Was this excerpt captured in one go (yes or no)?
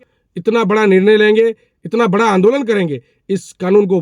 yes